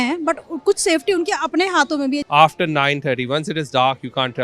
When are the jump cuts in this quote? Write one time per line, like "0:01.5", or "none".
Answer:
0:02.2